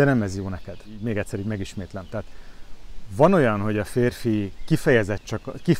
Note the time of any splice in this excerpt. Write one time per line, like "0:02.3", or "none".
0:01.0